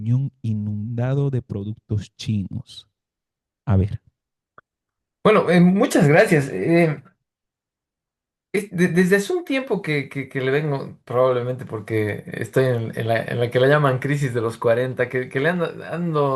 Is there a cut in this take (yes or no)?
no